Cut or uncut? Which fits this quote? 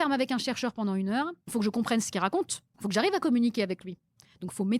cut